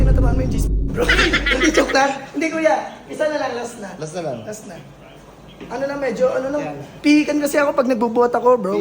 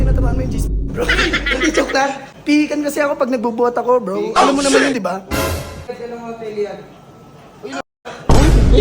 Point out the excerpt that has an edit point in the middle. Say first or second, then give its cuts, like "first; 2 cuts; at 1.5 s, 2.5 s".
second; 2 cuts; at 2.3 s, 5.8 s